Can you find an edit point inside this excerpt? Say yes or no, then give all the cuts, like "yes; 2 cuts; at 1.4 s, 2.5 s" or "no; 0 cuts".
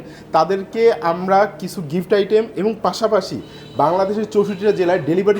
no; 0 cuts